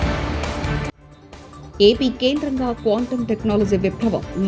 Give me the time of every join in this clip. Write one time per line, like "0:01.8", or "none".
none